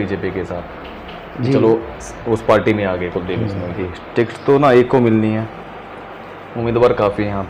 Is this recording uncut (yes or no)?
no